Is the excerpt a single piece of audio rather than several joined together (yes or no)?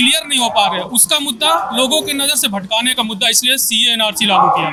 yes